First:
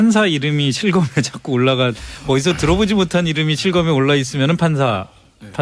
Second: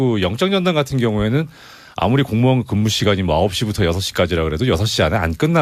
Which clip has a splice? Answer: first; 1 cut; at 2.5 s

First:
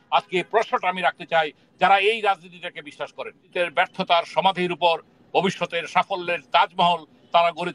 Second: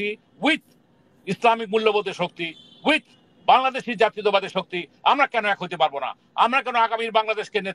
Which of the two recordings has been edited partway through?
first; 1 cut; at 3.5 s

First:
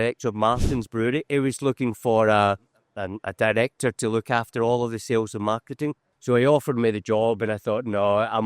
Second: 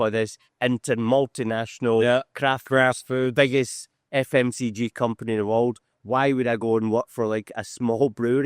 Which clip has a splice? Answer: first; 2 cuts; at 1.3 s, 6.1 s

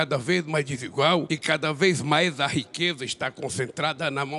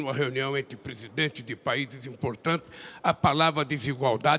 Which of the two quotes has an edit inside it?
first; 1 cut; at 1.3 s

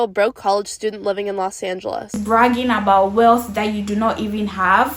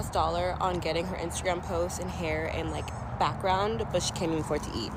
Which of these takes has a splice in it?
first; 1 cut; at 2.2 s

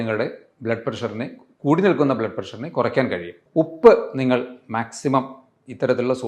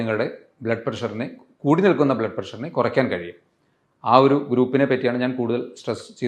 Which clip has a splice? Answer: first; 1 cut; at 3.4 s

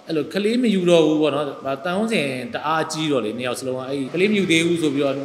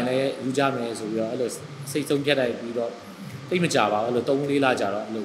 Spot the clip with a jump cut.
first; 1 cut; at 4.1 s

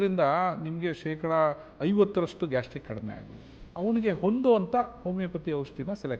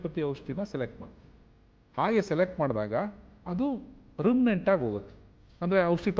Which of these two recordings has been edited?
first; 1 cut; at 3.6 s

